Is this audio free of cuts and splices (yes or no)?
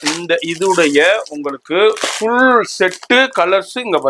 yes